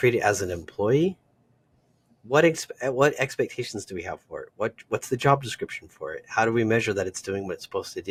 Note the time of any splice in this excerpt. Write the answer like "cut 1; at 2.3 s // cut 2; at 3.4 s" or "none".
none